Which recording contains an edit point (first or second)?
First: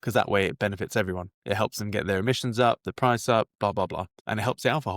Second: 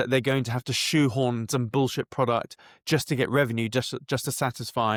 first